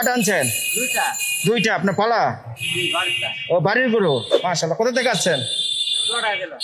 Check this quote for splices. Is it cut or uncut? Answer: uncut